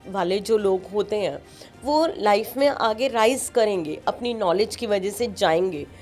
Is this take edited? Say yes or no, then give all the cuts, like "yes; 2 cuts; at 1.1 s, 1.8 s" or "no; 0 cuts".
no; 0 cuts